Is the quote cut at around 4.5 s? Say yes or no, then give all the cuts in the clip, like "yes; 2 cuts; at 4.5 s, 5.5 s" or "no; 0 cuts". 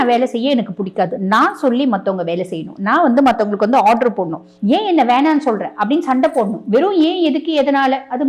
yes; 1 cut; at 4.5 s